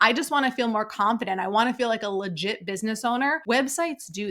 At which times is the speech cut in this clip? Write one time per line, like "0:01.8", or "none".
0:03.4

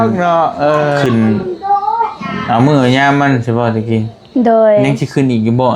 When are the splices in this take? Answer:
0:01.0

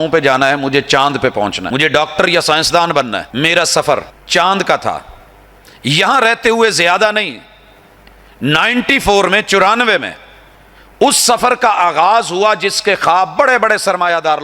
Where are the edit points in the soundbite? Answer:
0:01.6
0:03.3
0:04.2

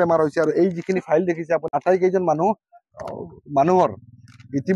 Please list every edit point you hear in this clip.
0:01.7

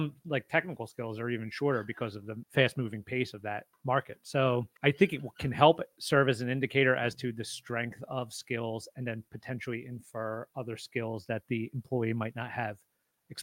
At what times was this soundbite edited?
0:02.3
0:03.7
0:04.7

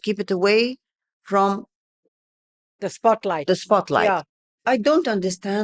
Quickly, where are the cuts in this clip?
0:04.5

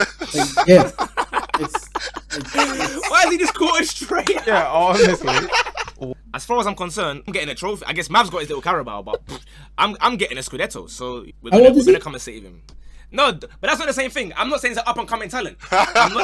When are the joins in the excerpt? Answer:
0:05.9
0:07.3
0:11.3

